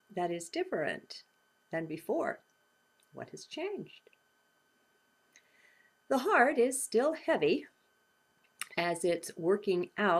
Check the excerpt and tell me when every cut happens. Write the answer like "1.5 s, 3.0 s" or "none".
3.0 s